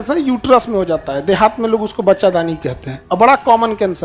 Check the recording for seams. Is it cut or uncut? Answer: uncut